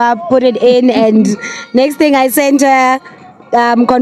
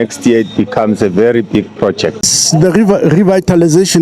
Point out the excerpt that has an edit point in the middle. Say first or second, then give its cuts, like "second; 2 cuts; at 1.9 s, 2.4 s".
second; 1 cut; at 2.4 s